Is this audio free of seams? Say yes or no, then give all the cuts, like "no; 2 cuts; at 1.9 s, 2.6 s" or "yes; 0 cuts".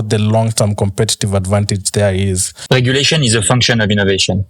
no; 1 cut; at 2.5 s